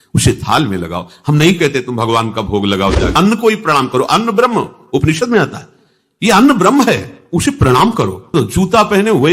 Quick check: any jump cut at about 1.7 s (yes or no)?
no